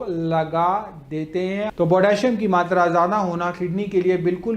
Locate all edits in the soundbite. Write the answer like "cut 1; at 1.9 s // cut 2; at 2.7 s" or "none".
cut 1; at 1.7 s